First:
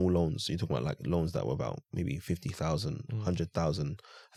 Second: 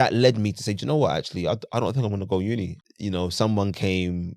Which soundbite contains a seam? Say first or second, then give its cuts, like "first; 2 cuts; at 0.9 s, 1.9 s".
second; 1 cut; at 2.8 s